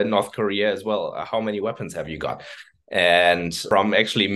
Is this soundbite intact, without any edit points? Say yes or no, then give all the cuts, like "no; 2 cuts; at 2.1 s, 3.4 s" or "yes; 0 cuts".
yes; 0 cuts